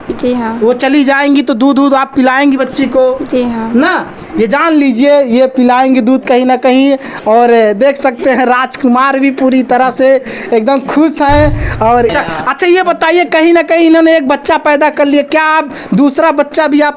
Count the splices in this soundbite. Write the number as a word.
one